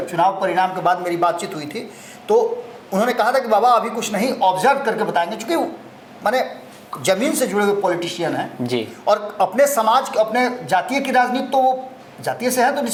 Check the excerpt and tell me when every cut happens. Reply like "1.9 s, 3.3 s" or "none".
none